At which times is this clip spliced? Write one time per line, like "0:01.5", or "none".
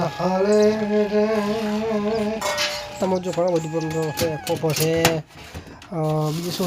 0:03.0